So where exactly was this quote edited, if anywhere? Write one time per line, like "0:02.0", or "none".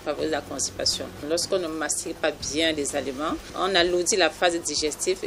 0:01.2
0:03.5